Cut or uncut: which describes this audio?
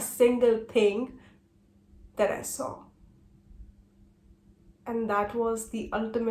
uncut